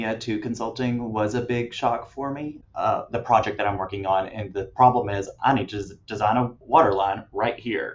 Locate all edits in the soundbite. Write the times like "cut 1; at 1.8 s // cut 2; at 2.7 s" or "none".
cut 1; at 2.6 s